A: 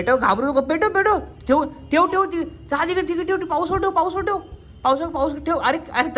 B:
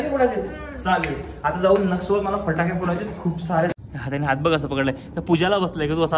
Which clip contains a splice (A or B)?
B